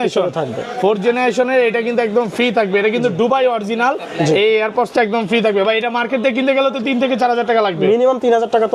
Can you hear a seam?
no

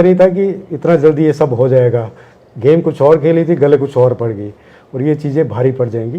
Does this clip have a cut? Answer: no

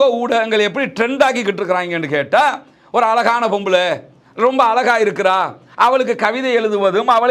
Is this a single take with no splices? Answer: yes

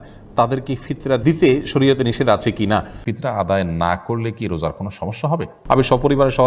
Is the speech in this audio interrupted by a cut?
yes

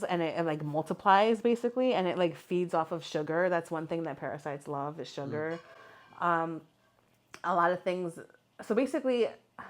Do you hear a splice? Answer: no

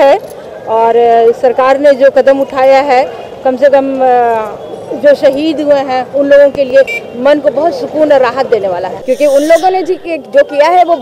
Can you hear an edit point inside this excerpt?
yes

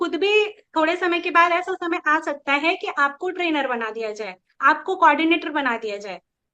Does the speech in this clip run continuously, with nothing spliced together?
yes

